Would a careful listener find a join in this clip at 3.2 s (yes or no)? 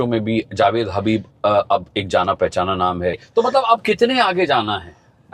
yes